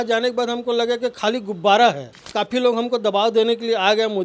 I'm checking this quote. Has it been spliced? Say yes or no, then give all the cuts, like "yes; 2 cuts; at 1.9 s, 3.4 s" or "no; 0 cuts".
yes; 1 cut; at 2.2 s